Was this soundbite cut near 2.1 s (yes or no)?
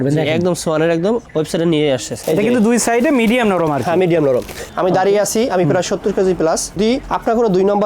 yes